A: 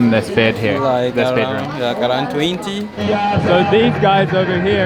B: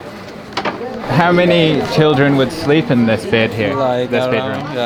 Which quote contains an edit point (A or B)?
A